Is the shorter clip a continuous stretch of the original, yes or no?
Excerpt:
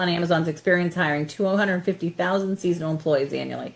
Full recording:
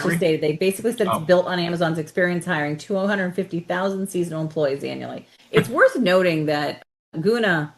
yes